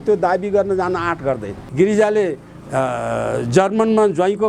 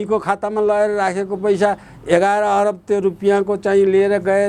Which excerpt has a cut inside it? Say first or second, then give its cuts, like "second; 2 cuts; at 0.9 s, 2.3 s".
first; 1 cut; at 1.6 s